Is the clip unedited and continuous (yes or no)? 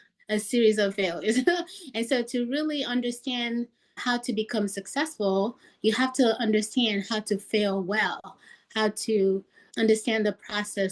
yes